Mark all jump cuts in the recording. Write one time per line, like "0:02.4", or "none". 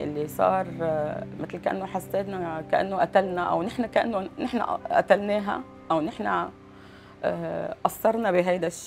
none